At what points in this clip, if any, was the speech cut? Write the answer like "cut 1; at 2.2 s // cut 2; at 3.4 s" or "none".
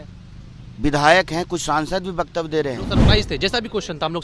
cut 1; at 3.0 s